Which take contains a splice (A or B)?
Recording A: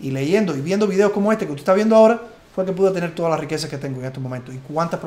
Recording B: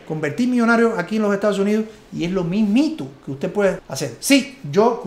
B